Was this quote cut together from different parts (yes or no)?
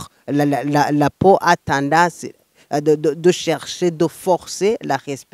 no